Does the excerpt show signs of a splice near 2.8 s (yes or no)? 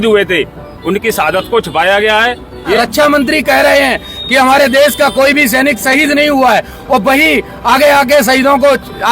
yes